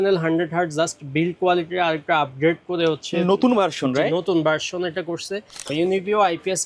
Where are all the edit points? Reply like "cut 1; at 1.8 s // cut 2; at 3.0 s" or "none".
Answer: cut 1; at 5.7 s